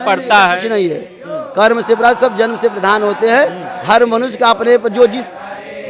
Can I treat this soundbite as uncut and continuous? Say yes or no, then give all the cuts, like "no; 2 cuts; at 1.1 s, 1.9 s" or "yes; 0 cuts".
yes; 0 cuts